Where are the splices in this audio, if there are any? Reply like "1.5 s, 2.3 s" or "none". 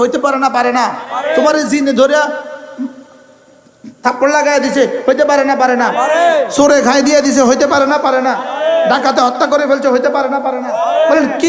none